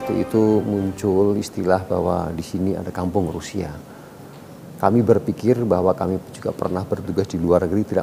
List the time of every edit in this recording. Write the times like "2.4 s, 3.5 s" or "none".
none